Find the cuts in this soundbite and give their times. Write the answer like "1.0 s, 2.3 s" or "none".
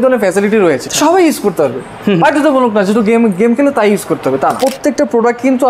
0.9 s, 4.6 s